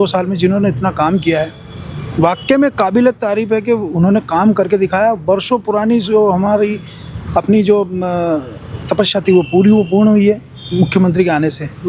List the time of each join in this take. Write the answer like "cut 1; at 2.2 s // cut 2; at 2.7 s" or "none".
none